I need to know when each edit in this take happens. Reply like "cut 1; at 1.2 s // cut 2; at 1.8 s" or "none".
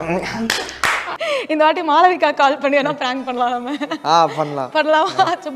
cut 1; at 1.1 s